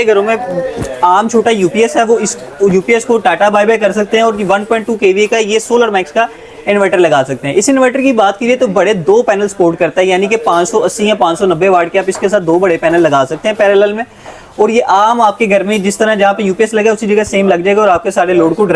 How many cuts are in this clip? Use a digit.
0